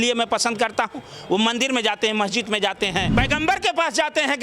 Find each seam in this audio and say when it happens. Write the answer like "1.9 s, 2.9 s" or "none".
3.1 s